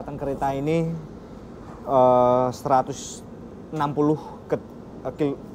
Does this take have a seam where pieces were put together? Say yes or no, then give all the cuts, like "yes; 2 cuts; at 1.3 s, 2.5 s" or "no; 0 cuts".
no; 0 cuts